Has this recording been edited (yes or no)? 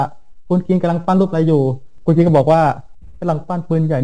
no